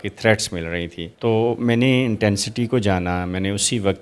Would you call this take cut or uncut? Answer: uncut